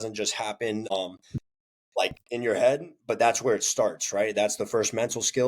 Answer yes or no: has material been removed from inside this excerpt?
yes